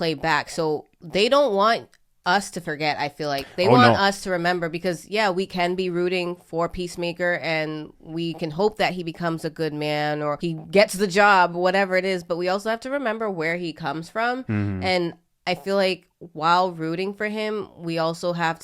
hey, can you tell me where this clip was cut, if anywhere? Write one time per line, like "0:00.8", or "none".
0:10.4